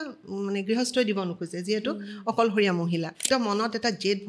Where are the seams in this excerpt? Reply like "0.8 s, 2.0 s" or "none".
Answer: 3.2 s